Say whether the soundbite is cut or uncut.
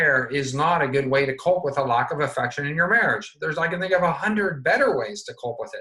uncut